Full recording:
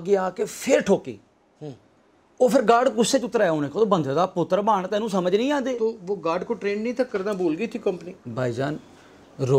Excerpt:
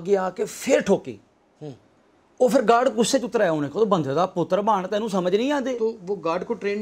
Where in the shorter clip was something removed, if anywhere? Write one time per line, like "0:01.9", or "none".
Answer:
none